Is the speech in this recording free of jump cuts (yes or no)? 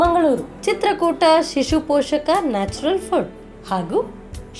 yes